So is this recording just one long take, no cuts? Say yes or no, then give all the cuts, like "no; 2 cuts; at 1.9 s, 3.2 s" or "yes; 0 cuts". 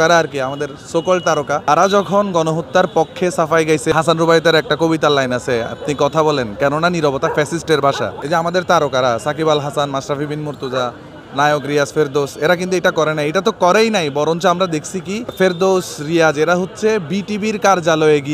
no; 4 cuts; at 1.7 s, 3.9 s, 8.1 s, 15.3 s